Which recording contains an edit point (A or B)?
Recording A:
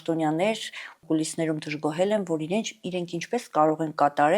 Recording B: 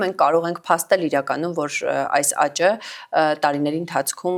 A